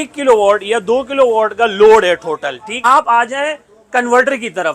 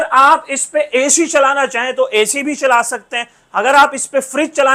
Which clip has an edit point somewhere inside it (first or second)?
first